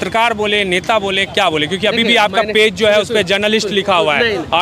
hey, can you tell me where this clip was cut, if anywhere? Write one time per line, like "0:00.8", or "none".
none